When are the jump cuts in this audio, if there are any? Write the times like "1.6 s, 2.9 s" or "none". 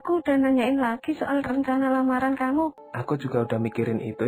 2.8 s